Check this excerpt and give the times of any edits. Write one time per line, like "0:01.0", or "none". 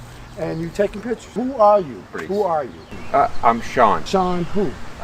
0:01.4
0:02.2
0:04.0